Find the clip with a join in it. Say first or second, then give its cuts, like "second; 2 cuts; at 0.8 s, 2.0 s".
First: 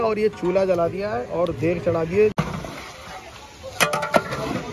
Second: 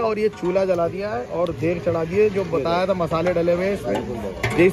first; 1 cut; at 2.3 s